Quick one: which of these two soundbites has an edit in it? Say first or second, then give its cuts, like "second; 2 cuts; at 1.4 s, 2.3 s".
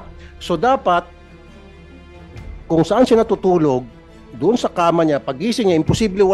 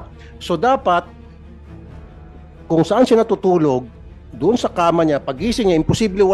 second; 2 cuts; at 1.1 s, 2.7 s